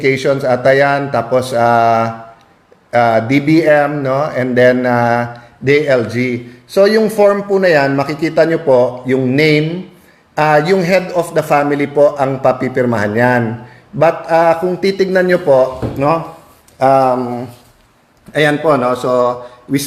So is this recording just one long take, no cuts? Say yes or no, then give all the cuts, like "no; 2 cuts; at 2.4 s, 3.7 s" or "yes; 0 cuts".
yes; 0 cuts